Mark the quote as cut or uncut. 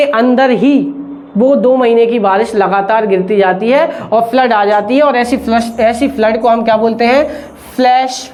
uncut